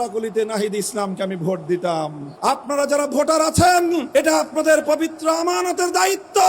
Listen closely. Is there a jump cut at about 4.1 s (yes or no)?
yes